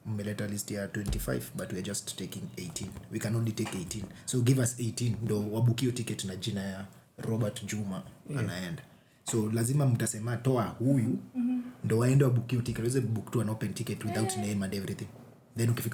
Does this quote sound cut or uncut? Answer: uncut